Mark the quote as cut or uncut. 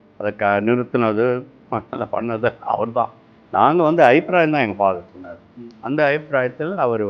uncut